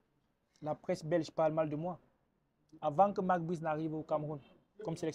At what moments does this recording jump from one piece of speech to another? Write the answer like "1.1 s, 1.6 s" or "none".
none